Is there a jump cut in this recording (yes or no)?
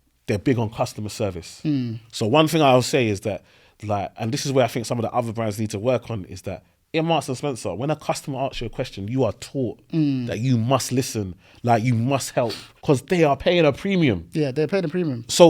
yes